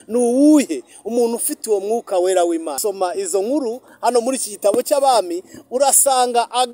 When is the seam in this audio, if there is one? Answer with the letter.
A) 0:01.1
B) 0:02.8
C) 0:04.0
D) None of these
B